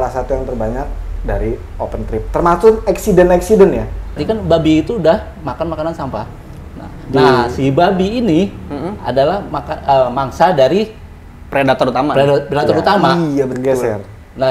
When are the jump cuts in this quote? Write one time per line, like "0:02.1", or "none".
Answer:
0:04.2

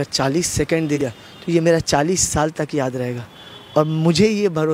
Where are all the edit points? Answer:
0:01.0

